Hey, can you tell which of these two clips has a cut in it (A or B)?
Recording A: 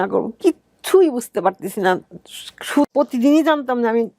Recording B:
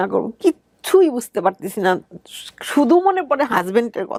A